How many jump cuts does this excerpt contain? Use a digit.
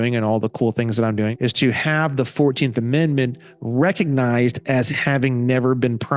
1